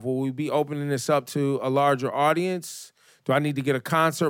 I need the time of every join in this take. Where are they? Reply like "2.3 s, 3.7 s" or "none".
1.3 s

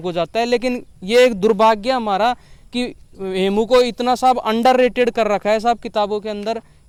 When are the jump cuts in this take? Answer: none

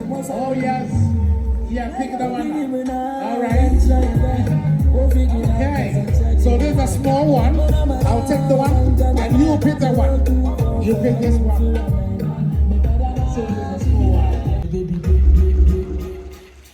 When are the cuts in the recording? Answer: 14.7 s

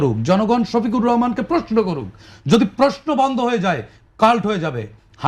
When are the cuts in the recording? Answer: none

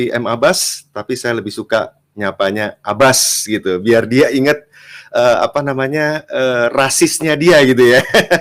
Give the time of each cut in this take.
none

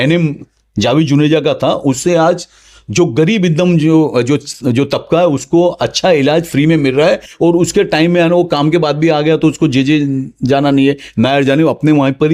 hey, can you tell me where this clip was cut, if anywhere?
none

